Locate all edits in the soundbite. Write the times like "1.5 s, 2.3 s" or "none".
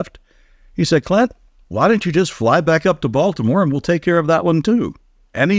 none